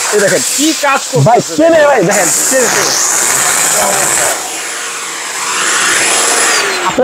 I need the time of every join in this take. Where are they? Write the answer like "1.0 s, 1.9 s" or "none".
none